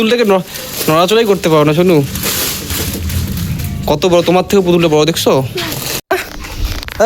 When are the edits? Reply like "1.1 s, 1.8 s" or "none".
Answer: 6.0 s

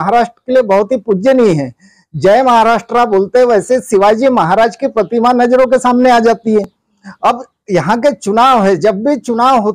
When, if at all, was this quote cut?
none

